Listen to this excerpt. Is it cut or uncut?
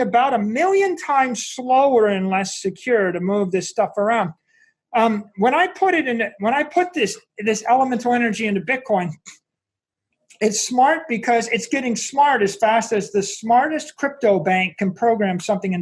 uncut